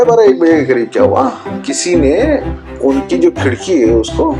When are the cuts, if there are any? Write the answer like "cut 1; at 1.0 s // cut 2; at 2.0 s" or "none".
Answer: cut 1; at 1.6 s